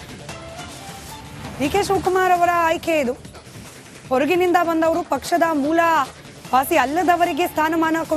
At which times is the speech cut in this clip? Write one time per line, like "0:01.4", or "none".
0:00.9